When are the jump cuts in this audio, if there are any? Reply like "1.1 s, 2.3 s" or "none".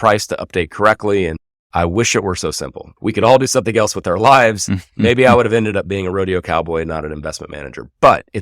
1.5 s, 2.8 s